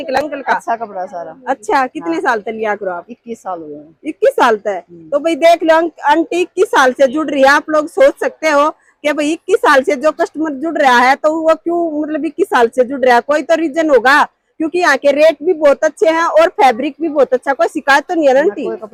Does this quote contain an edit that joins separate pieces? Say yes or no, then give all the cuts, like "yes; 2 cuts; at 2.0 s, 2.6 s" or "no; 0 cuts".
no; 0 cuts